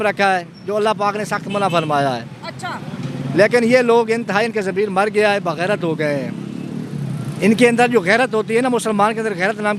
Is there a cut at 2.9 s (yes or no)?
no